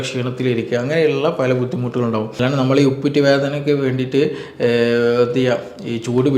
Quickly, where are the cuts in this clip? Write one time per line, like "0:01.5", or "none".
0:02.4